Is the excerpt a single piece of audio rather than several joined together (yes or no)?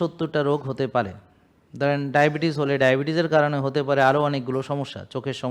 yes